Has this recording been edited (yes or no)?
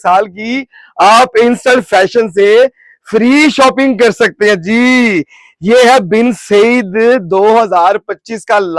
no